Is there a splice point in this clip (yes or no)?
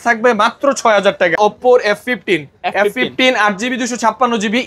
yes